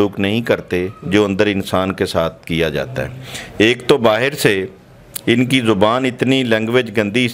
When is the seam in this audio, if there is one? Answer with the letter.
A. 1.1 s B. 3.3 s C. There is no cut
C